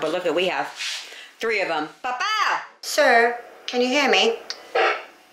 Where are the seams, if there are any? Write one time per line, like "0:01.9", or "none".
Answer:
0:02.7